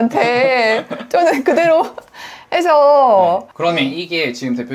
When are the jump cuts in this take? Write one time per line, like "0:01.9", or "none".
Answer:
0:03.5